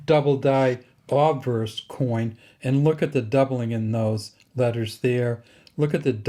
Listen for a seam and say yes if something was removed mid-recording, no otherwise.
no